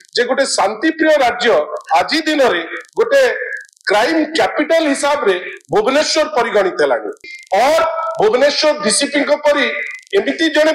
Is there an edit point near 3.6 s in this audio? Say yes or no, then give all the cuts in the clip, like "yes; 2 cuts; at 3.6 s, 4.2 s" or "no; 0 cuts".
no; 1 cut; at 7.2 s